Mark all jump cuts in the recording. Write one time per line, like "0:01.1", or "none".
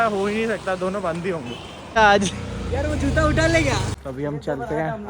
0:02.0
0:03.9